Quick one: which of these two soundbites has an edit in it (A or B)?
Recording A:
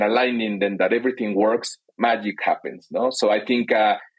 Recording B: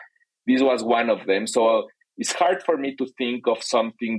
A